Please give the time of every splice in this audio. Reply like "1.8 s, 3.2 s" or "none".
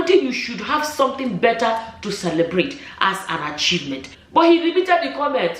4.1 s